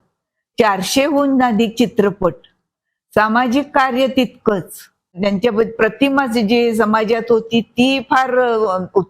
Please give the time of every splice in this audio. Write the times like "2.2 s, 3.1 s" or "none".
5.2 s